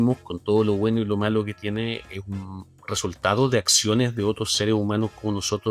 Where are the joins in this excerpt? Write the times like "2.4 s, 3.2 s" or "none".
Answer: none